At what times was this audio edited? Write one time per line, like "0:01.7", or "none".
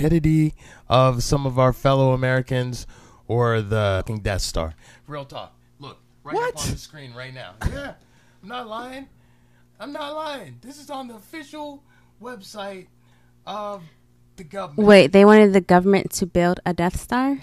none